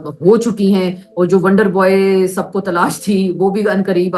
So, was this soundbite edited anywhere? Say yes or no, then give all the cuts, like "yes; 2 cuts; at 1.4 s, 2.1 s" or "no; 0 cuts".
no; 0 cuts